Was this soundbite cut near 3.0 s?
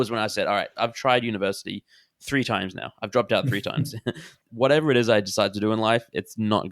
no; 1 cut; at 4.5 s

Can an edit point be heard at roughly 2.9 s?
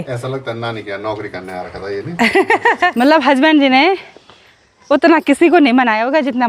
yes; 1 cut; at 2.9 s

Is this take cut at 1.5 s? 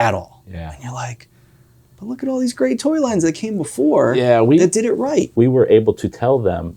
no; 1 cut; at 5.3 s

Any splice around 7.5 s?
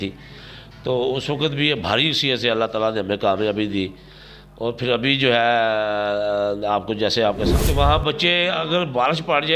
yes; 1 cut; at 7.5 s

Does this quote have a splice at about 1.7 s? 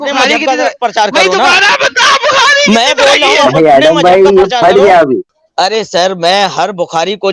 no; 1 cut; at 5.4 s

